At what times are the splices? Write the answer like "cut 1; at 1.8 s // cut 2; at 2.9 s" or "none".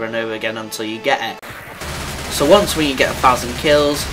cut 1; at 1.2 s